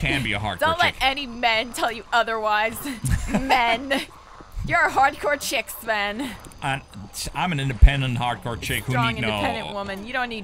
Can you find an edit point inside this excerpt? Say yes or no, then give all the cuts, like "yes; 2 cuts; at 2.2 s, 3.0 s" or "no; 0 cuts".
no; 0 cuts